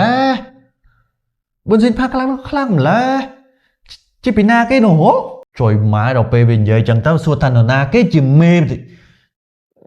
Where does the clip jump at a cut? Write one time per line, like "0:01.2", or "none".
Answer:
0:05.4